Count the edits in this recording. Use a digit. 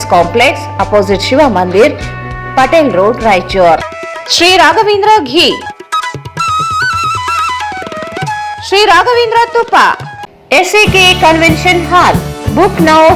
0